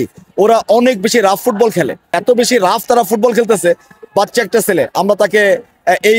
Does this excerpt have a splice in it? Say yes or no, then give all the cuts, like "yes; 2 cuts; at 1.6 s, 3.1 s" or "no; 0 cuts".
yes; 1 cut; at 2.2 s